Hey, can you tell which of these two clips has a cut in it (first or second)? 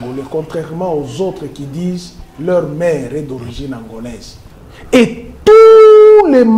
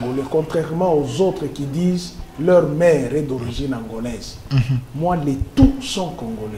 first